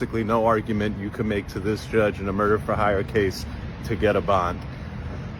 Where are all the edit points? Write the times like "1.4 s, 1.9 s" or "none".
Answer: 3.1 s